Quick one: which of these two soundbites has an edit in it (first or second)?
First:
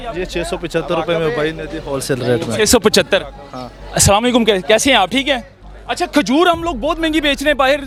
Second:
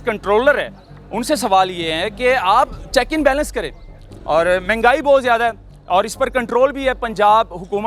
second